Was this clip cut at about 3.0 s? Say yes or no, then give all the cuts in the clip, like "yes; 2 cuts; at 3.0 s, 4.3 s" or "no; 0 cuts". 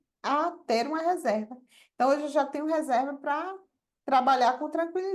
no; 0 cuts